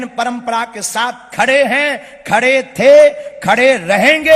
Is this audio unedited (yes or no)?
yes